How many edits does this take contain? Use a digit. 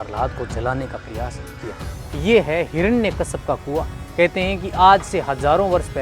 1